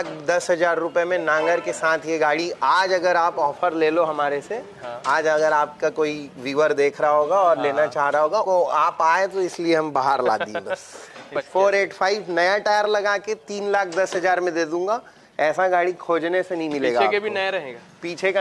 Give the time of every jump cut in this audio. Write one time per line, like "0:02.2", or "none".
0:08.4
0:11.4